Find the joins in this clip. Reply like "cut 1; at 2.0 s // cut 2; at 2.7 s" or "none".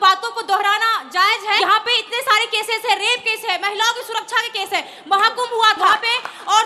cut 1; at 1.6 s // cut 2; at 5.9 s